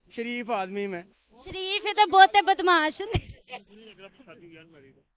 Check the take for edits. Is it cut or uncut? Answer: uncut